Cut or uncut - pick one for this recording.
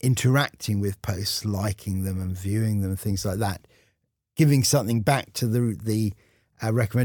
uncut